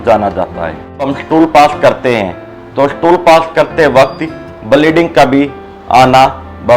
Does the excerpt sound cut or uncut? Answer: cut